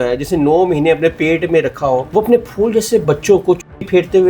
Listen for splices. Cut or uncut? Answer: cut